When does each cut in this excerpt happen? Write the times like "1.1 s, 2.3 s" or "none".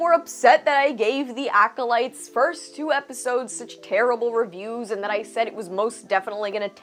none